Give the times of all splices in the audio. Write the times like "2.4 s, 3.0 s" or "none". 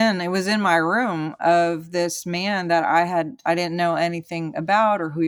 none